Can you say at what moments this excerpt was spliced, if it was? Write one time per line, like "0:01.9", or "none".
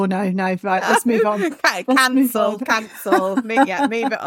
none